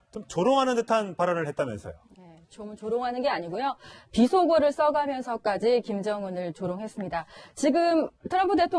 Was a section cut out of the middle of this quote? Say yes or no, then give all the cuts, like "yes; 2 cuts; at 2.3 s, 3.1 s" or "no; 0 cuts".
no; 0 cuts